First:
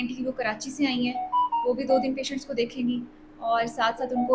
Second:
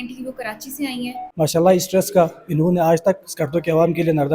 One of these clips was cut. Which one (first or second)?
second